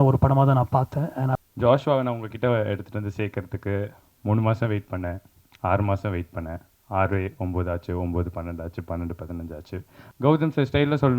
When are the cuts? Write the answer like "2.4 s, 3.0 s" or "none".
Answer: 1.3 s, 10.0 s